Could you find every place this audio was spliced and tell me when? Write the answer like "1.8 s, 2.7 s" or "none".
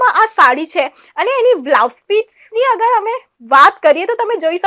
none